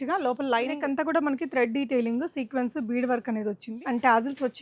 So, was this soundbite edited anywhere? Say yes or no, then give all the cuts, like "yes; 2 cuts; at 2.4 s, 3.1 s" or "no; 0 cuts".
yes; 2 cuts; at 0.8 s, 3.7 s